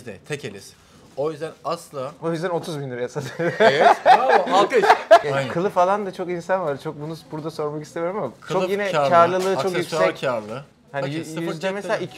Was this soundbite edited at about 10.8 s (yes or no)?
no